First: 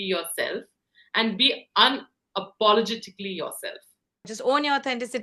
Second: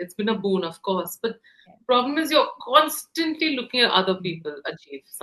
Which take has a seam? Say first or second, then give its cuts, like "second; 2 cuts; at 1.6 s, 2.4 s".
first; 1 cut; at 4.3 s